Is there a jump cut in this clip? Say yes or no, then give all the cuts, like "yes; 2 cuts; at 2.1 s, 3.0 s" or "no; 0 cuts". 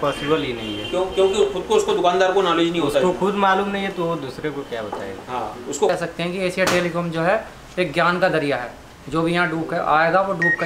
yes; 1 cut; at 5.9 s